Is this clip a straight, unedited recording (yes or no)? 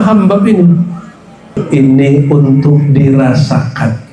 no